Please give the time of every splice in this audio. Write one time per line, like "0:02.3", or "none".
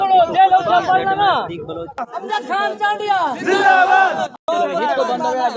0:02.0
0:04.4